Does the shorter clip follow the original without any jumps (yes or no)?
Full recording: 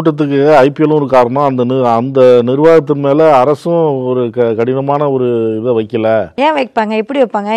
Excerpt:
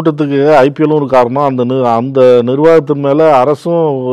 yes